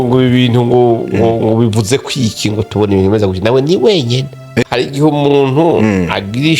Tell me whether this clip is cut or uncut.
cut